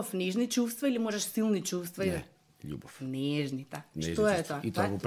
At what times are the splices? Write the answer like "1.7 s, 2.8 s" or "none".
none